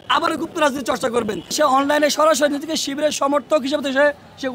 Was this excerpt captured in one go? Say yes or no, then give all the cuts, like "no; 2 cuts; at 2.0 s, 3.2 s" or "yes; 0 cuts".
no; 1 cut; at 1.5 s